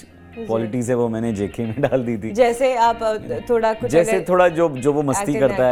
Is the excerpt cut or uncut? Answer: uncut